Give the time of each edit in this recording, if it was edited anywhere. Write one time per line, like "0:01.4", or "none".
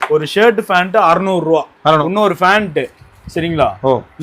0:02.0